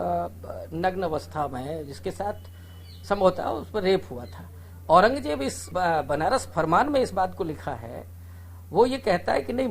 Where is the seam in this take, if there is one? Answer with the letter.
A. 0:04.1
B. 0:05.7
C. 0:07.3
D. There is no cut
B